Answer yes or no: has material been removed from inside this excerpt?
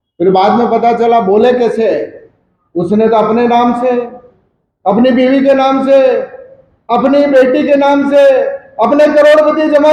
no